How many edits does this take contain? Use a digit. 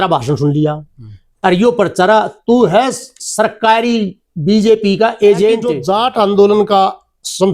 1